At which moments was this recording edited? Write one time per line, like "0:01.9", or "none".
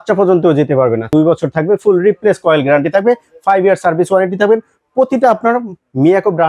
0:01.1